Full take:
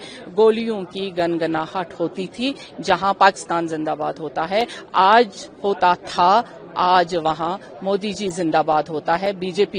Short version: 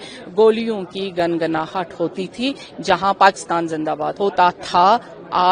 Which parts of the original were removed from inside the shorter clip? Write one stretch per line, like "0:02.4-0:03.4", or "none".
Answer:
0:04.1-0:05.5